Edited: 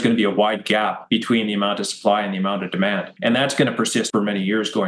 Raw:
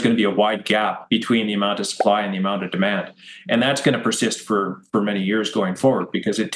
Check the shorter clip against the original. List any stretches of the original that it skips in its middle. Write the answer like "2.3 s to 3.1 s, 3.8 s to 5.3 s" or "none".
3.1 s to 3.4 s, 4.3 s to 4.9 s